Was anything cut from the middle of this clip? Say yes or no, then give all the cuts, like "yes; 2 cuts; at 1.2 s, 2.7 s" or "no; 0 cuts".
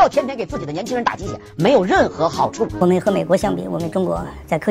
yes; 1 cut; at 2.7 s